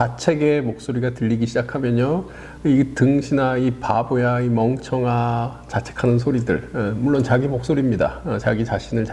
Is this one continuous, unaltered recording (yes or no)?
yes